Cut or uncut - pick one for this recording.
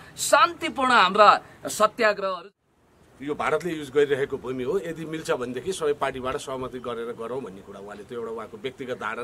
cut